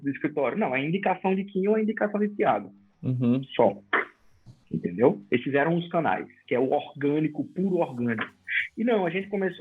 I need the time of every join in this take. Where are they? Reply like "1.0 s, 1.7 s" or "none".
none